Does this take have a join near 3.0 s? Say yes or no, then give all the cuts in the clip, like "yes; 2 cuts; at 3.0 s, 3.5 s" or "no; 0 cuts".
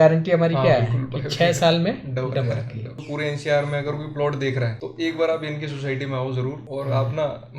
yes; 3 cuts; at 3.0 s, 4.8 s, 6.6 s